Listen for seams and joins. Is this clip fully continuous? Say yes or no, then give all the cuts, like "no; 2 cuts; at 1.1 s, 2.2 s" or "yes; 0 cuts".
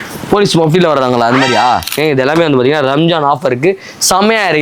no; 1 cut; at 2.0 s